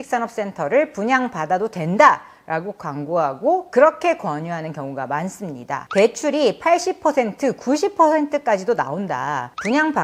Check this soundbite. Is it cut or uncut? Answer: uncut